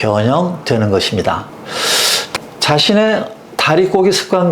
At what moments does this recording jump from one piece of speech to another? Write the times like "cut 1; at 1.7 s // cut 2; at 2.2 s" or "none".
cut 1; at 2.3 s